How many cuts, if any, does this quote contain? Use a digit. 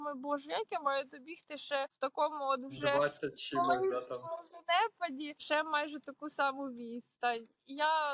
2